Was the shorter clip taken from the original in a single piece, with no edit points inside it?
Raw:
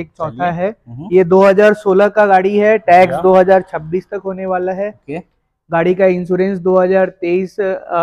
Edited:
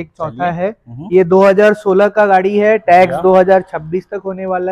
yes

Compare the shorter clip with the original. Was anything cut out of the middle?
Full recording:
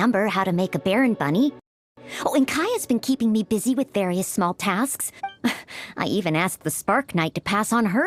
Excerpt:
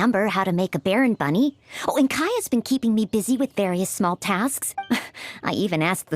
yes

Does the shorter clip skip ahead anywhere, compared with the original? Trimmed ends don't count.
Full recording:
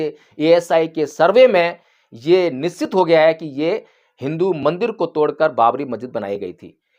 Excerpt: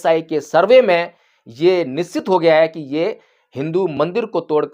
no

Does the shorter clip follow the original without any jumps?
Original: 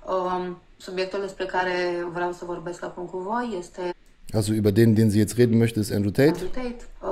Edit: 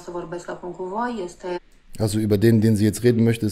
yes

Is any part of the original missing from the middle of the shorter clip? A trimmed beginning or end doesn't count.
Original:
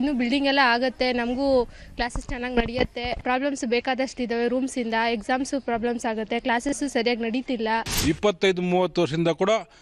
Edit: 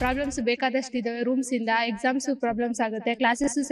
no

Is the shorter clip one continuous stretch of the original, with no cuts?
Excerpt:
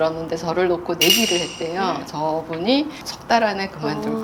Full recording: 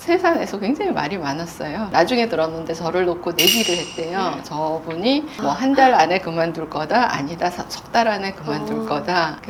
no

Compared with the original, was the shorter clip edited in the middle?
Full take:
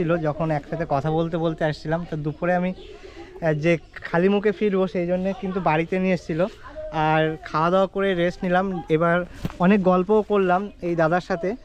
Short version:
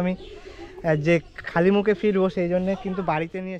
no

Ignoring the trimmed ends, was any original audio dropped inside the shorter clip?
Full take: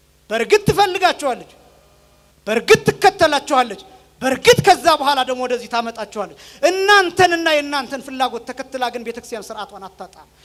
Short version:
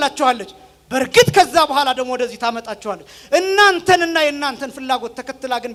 no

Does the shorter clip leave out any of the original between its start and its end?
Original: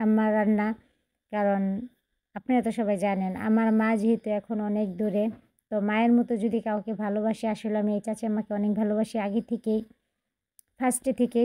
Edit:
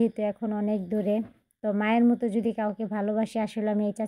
no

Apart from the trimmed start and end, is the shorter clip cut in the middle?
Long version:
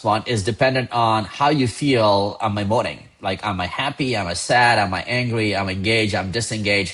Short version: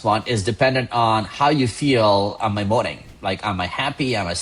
no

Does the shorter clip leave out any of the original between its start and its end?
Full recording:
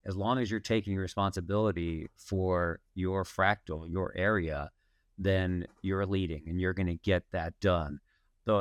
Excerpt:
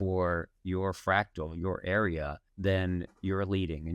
yes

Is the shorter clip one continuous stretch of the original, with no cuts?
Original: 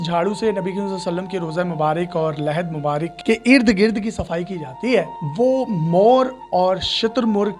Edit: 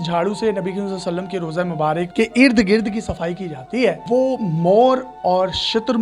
no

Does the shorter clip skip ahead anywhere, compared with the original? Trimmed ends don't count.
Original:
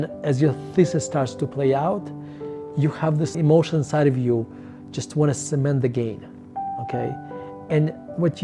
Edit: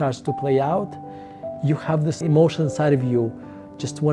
no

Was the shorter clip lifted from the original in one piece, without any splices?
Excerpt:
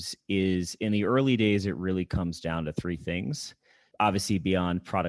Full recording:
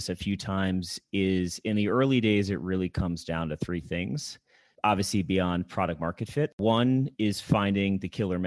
yes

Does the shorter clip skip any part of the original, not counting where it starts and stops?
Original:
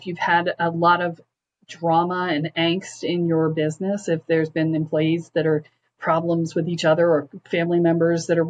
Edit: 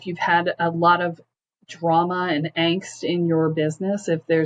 no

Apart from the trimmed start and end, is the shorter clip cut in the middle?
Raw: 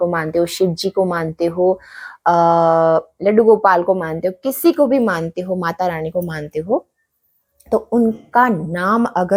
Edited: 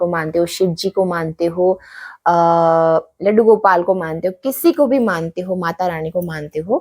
no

